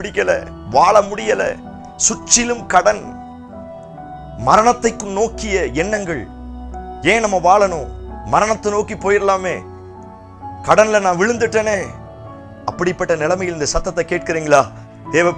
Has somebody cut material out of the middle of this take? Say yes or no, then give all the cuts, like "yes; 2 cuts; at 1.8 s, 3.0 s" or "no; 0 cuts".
no; 0 cuts